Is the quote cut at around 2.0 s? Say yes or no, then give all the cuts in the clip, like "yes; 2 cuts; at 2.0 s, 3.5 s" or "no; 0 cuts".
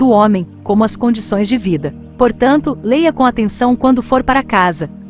yes; 1 cut; at 2.0 s